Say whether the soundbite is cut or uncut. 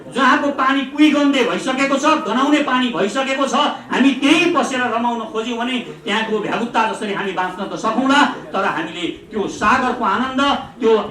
uncut